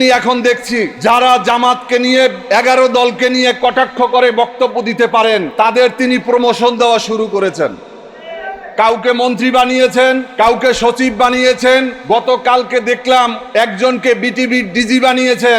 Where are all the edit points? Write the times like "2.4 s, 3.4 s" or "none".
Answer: 0.9 s, 2.4 s, 5.5 s, 10.3 s, 11.9 s, 13.4 s